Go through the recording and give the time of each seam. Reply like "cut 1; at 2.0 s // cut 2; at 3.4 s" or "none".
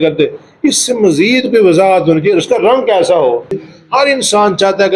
cut 1; at 3.6 s